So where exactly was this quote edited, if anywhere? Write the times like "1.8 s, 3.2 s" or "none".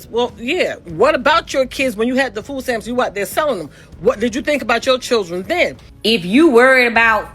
5.9 s